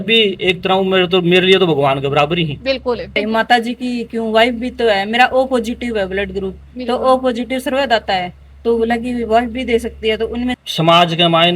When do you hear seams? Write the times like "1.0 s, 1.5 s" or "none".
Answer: 3.2 s, 10.6 s